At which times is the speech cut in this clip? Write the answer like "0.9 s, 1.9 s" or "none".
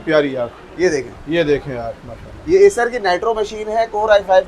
none